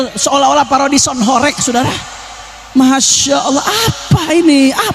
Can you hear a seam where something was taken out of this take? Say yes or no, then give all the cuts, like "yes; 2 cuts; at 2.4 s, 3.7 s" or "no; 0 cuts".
no; 0 cuts